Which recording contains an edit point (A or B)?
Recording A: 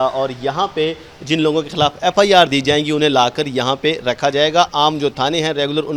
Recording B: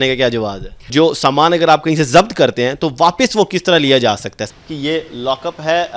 B